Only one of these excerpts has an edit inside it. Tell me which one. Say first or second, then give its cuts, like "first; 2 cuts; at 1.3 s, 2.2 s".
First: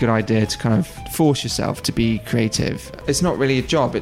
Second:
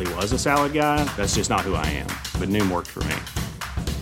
first; 2 cuts; at 1.0 s, 2.9 s